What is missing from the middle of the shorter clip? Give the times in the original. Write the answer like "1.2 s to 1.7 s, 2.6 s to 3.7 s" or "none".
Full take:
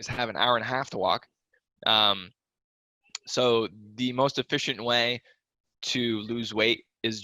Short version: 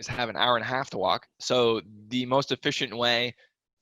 1.3 s to 3.2 s

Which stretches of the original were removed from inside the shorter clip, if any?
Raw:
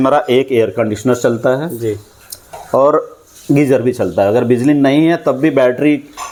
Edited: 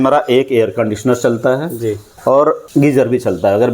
2.1 s to 2.5 s, 3.1 s to 3.4 s

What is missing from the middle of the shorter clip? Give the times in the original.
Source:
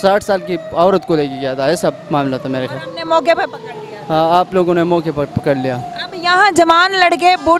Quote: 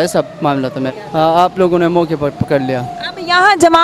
2.7 s to 3.9 s

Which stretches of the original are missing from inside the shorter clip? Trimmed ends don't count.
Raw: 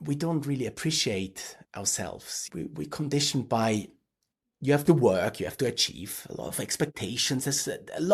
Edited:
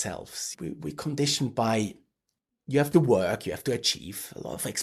none

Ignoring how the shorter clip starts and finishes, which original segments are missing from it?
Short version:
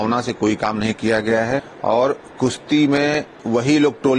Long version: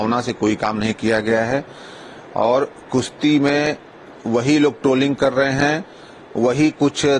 1.7 s to 2.2 s, 3.8 s to 4.1 s

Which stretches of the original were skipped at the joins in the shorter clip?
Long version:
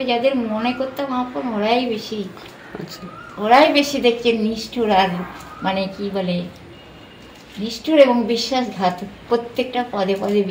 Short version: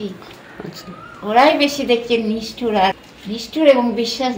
5.2 s to 7.4 s

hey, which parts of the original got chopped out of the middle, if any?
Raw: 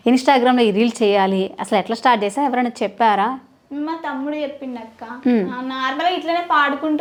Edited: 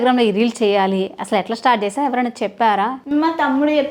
3.4 s to 3.6 s

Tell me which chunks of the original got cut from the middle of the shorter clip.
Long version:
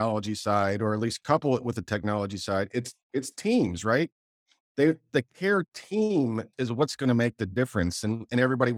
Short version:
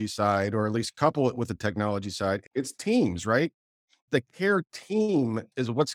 2.7 s to 3.0 s, 4.6 s to 5.0 s

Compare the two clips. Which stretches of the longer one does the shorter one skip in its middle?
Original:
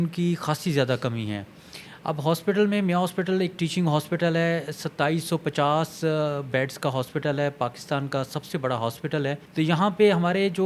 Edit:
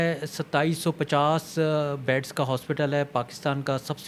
none

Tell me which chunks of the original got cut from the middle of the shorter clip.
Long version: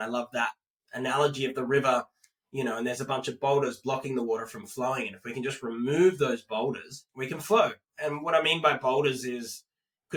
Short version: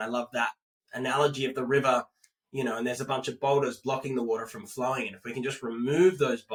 none

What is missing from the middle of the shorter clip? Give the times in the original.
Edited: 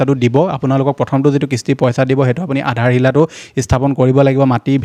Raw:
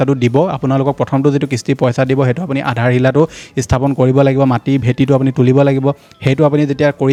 none

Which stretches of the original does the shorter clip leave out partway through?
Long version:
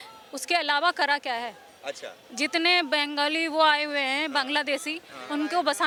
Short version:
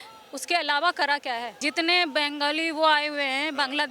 1.5 s to 2.3 s

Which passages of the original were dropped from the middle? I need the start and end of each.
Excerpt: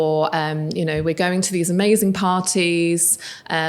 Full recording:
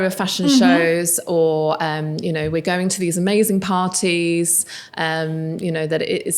none

